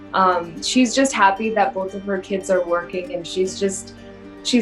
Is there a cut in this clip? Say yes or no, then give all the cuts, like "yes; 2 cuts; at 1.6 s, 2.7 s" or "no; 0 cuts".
no; 0 cuts